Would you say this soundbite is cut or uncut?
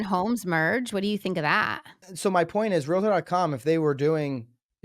cut